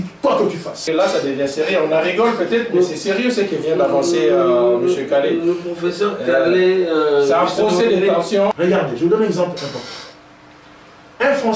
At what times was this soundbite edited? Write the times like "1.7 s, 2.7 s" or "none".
0.8 s, 8.5 s